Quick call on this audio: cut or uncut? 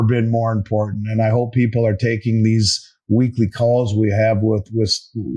uncut